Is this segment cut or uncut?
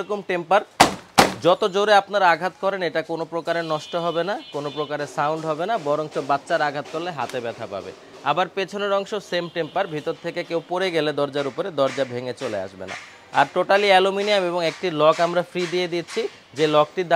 uncut